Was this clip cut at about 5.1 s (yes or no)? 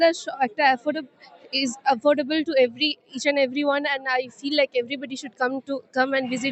no